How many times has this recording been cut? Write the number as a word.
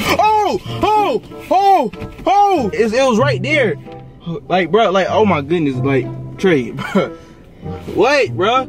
one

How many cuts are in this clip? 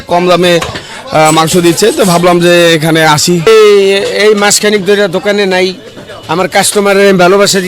one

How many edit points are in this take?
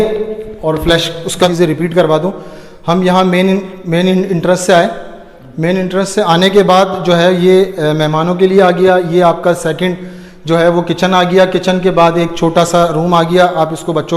one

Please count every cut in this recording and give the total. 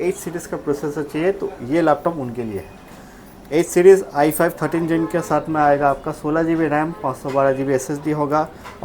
zero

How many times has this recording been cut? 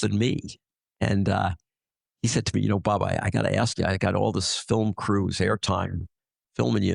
zero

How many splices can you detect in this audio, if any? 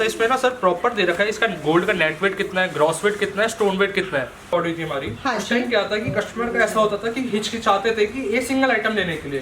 one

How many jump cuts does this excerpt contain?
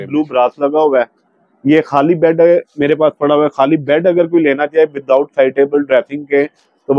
zero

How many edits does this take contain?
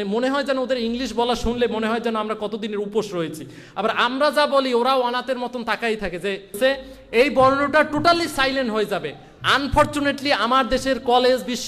one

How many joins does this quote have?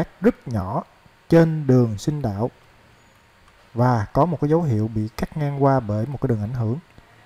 zero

